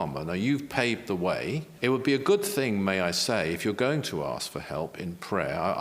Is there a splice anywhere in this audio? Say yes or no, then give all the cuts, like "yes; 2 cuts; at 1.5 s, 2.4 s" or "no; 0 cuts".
yes; 1 cut; at 1.7 s